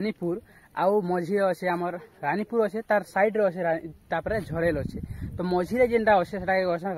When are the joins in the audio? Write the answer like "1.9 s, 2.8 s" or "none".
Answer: none